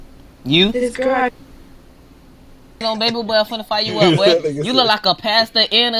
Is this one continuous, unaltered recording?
no; 1 cut; at 2.8 s

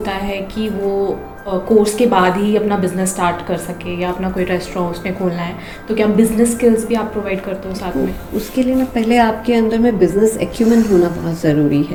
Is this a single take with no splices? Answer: yes; 0 cuts

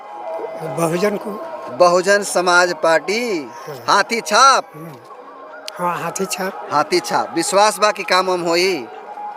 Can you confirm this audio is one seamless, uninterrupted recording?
yes; 0 cuts

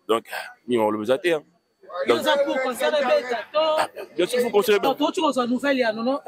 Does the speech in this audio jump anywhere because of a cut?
yes; 1 cut; at 4.8 s

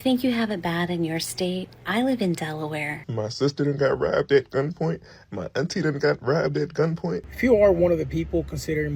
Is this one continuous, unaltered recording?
no; 3 cuts; at 1.8 s, 3.0 s, 7.3 s

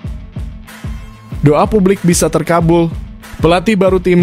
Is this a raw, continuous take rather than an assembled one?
no; 1 cut; at 1.4 s

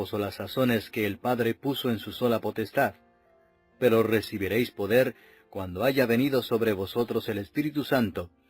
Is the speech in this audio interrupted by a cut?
yes; 1 cut; at 5.7 s

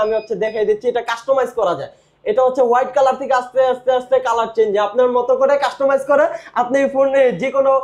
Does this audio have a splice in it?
no; 0 cuts

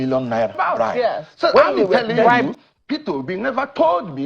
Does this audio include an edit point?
yes; 1 cut; at 2.5 s

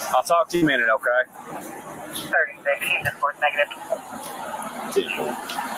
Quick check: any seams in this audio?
no; 0 cuts

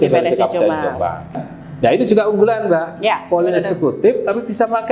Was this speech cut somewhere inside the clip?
yes; 1 cut; at 1.3 s

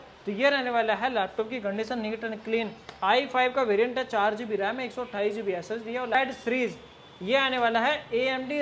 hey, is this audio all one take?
no; 1 cut; at 6.2 s

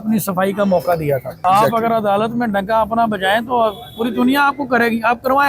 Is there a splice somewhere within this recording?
yes; 1 cut; at 1.3 s

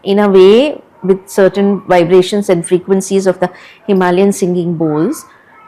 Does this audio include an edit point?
no; 0 cuts

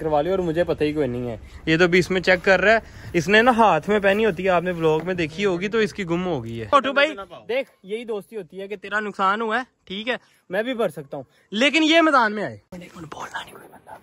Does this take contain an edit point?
yes; 2 cuts; at 6.7 s, 12.7 s

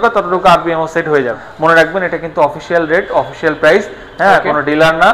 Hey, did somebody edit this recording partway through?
yes; 1 cut; at 1.4 s

